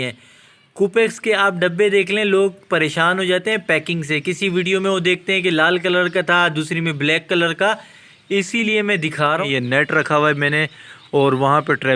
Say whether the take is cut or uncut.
cut